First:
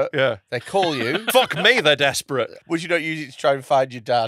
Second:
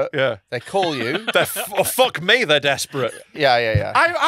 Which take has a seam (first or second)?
first